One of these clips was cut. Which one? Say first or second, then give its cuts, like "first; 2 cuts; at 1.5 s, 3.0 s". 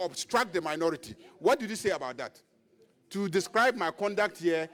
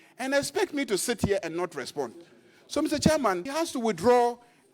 second; 1 cut; at 3.5 s